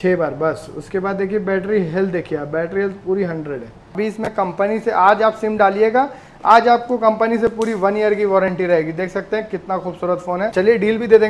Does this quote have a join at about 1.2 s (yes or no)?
no